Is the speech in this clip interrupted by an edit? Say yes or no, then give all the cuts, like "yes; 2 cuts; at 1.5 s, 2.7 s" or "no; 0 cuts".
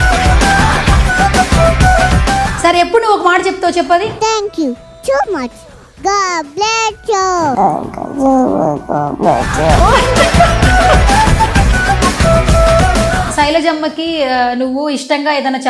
yes; 2 cuts; at 2.5 s, 13.3 s